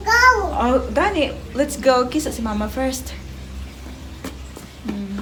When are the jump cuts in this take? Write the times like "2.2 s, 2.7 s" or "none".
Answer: none

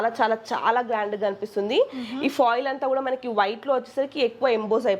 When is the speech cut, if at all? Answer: none

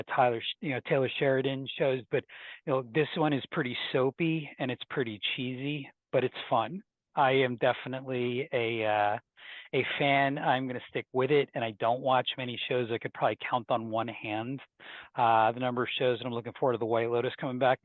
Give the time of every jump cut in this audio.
none

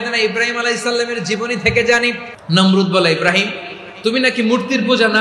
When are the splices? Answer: 2.3 s

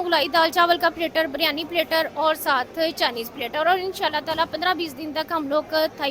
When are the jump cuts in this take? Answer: none

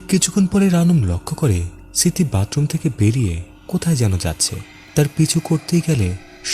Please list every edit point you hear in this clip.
none

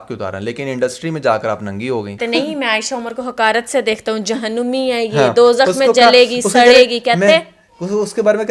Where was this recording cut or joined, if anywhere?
2.2 s

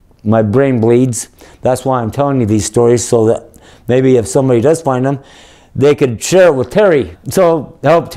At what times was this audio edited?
7.2 s

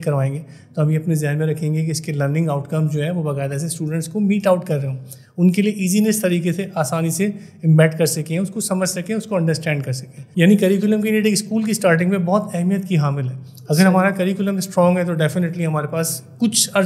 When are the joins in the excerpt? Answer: none

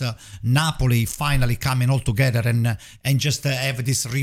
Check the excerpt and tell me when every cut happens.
none

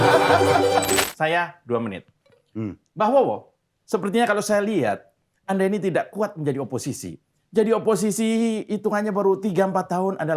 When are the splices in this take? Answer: 1.0 s

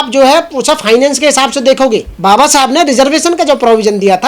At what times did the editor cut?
2.1 s

